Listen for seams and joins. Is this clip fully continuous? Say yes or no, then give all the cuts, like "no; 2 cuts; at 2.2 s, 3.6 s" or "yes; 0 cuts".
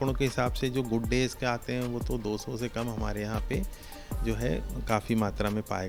yes; 0 cuts